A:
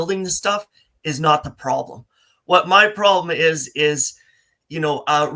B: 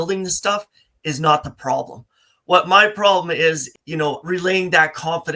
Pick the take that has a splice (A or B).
B